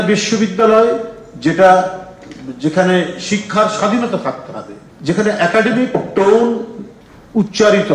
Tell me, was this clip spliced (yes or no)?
no